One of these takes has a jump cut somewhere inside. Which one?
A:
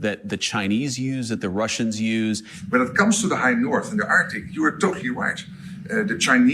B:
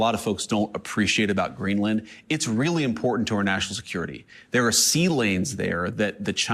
A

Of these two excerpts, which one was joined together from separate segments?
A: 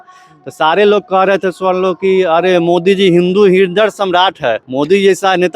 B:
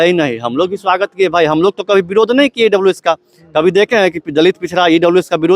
A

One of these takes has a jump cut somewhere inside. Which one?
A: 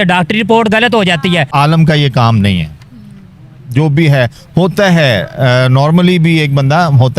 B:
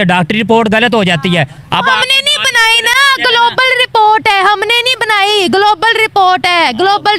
A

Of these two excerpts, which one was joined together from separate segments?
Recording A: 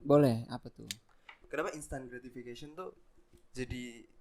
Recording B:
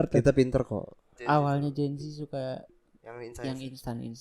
B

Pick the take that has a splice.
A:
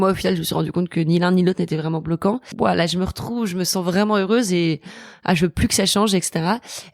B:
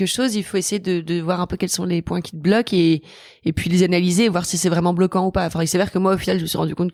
A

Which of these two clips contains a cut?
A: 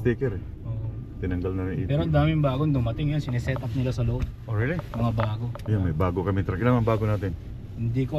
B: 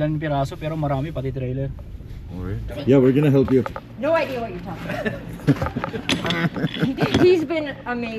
B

